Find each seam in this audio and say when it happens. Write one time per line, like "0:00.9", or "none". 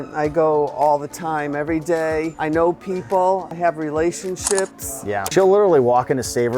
0:02.3
0:03.5
0:05.3